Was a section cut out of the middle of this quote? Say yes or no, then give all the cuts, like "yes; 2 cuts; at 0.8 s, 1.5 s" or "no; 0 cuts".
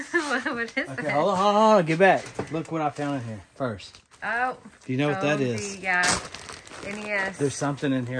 no; 0 cuts